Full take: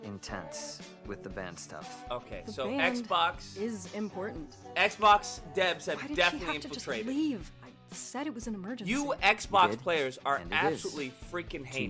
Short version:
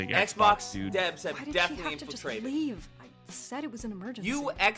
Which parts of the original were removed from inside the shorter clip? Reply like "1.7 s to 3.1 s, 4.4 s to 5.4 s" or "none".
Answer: none